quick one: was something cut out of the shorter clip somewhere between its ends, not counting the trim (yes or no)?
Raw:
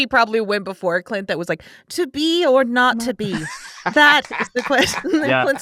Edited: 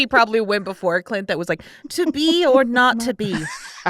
no